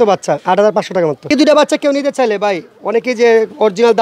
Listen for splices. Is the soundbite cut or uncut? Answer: cut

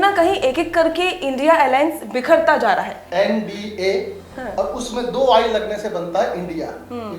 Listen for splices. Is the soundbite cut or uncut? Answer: cut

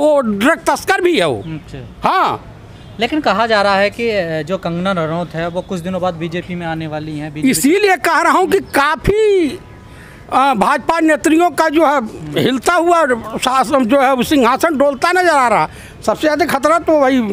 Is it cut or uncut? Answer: uncut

